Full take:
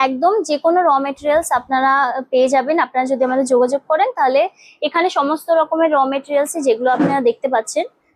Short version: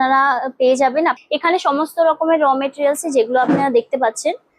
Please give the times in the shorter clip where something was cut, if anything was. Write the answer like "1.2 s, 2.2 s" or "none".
1.2 s